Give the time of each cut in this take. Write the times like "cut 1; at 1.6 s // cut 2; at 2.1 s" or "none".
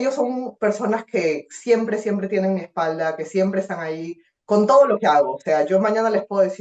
none